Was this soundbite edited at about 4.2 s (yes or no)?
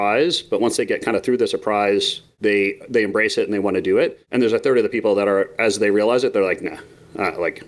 yes